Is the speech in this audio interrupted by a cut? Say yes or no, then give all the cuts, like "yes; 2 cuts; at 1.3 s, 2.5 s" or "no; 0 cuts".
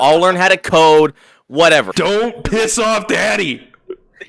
yes; 1 cut; at 1.9 s